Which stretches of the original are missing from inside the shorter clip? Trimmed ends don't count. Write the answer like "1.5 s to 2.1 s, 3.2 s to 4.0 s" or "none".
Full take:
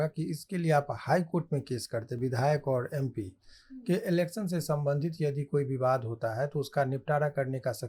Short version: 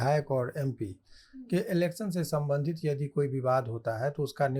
none